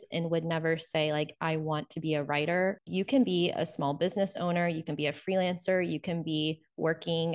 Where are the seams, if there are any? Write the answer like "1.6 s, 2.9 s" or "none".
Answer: 2.8 s